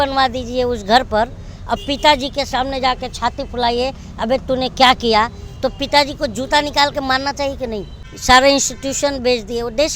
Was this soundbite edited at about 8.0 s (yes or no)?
yes